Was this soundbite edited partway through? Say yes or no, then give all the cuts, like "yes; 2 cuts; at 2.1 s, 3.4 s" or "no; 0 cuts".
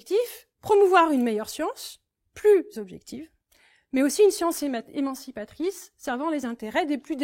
no; 0 cuts